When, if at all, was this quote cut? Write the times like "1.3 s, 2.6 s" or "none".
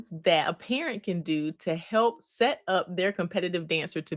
none